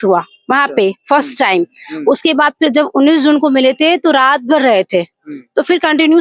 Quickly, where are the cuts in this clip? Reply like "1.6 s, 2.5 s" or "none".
none